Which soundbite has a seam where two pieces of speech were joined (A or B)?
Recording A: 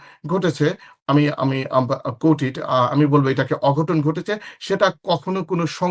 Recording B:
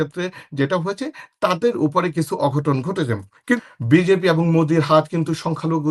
B